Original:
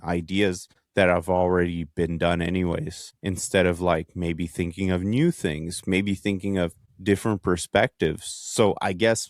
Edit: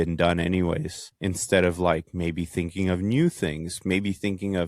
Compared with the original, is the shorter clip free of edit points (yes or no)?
yes